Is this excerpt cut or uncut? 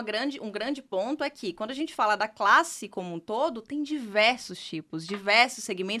uncut